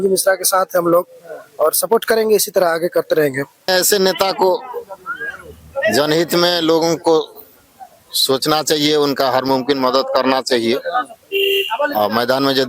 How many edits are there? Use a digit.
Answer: 1